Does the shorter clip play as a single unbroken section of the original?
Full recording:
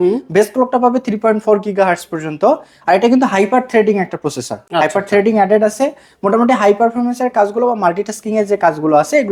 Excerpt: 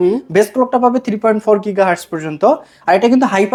yes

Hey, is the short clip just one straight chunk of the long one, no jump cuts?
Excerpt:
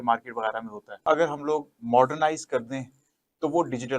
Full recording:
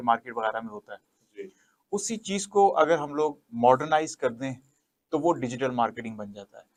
no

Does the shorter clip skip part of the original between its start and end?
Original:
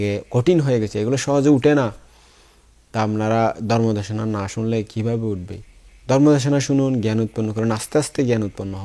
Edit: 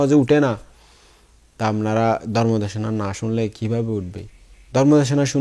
no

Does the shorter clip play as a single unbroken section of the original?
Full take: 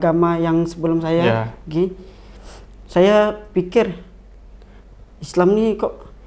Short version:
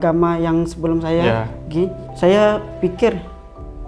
no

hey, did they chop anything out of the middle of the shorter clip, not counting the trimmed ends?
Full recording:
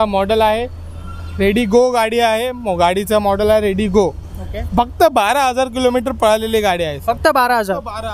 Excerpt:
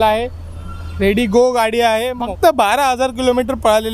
yes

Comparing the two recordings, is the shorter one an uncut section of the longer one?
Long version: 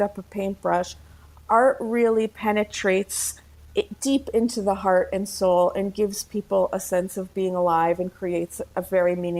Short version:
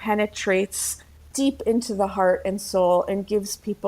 no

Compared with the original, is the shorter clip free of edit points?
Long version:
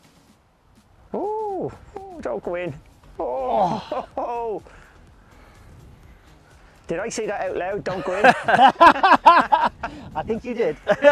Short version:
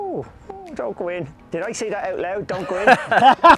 no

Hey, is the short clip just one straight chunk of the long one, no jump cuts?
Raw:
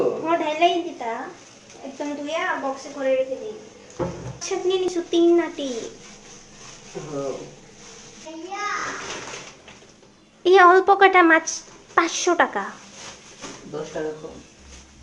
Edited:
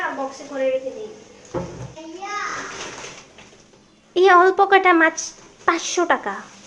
no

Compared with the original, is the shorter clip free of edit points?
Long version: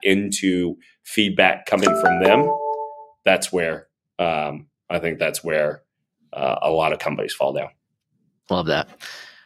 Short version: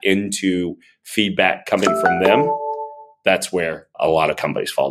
no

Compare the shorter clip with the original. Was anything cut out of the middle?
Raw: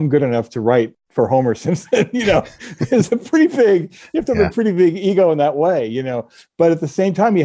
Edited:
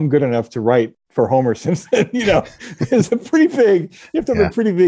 no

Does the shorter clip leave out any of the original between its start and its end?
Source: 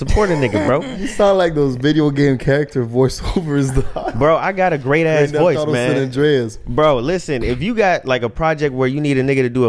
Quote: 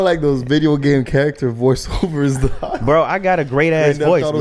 no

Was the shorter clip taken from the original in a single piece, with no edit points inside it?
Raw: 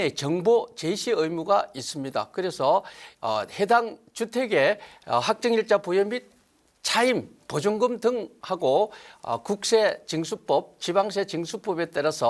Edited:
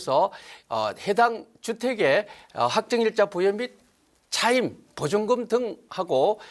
yes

